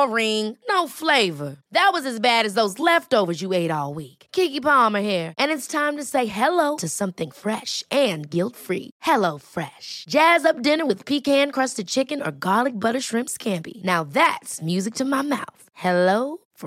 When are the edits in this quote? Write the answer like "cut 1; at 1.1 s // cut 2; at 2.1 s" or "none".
none